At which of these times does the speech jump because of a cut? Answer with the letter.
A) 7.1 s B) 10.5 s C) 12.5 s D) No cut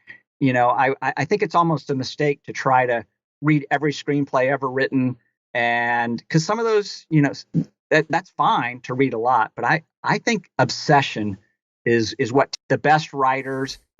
C